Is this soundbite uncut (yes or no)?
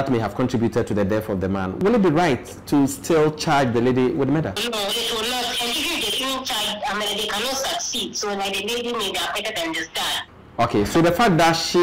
no